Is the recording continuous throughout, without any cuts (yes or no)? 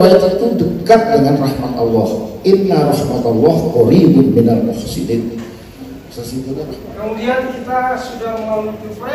no